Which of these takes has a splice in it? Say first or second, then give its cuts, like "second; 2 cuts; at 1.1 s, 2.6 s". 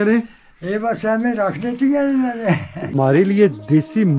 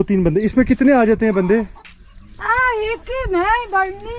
first; 1 cut; at 2.8 s